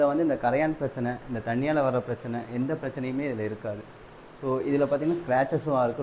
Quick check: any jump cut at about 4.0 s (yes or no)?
no